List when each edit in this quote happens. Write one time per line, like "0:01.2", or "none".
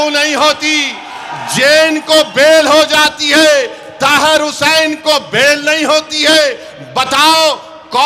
none